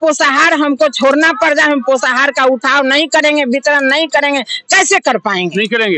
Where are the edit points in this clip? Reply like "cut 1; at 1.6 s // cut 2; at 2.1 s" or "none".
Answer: none